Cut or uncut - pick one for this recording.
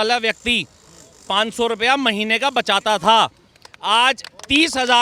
uncut